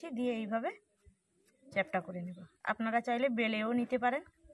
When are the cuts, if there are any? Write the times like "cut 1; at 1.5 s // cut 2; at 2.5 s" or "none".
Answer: none